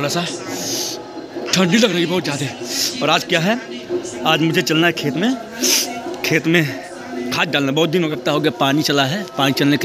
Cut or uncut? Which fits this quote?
uncut